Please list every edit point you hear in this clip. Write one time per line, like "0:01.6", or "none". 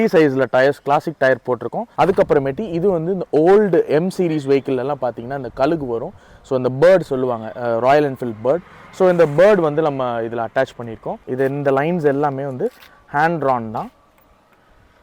0:01.8
0:11.2